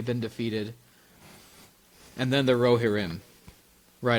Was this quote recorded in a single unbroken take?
yes; 0 cuts

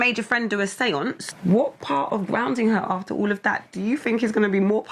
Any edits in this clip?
yes; 1 cut; at 1.2 s

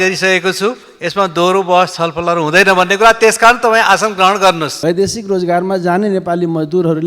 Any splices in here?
yes; 1 cut; at 4.7 s

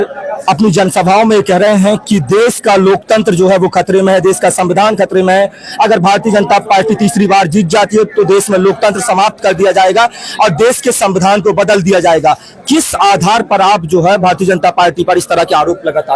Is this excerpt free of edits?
yes; 0 cuts

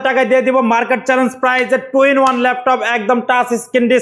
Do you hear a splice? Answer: no; 0 cuts

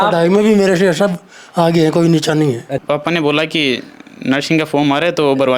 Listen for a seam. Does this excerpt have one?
yes; 1 cut; at 2.7 s

